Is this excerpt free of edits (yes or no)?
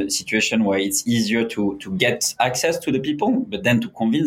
yes